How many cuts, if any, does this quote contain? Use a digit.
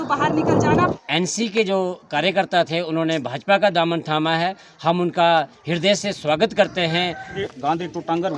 2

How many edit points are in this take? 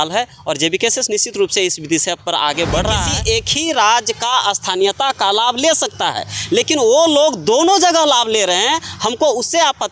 1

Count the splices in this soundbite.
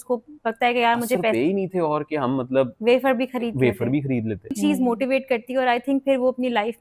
2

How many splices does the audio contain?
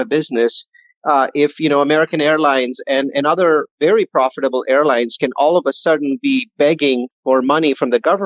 1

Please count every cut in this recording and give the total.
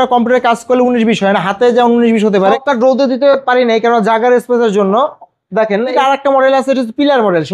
2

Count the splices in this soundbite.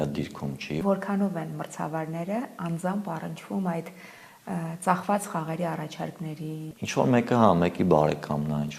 2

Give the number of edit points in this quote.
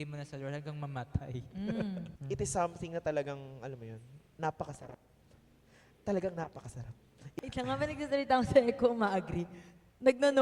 2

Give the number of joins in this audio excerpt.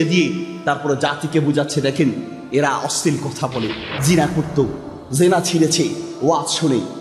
1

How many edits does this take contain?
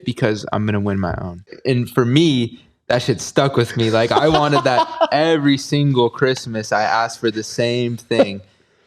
1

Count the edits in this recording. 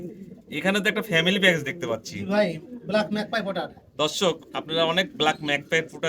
0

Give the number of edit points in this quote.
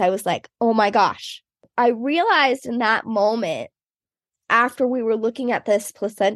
1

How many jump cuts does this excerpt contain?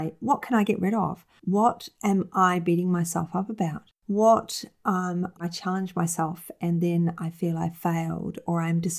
1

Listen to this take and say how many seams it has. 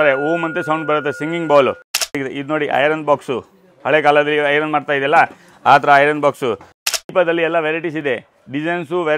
2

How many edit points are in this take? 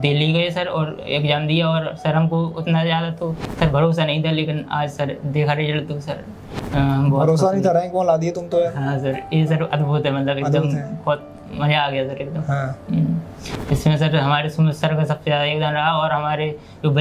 0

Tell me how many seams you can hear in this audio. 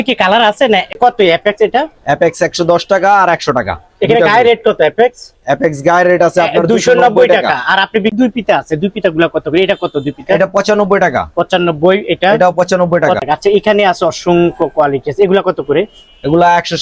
3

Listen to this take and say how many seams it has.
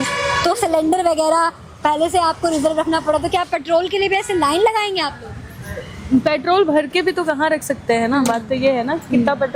0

